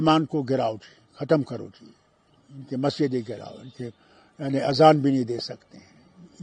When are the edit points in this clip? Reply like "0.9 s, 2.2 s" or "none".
none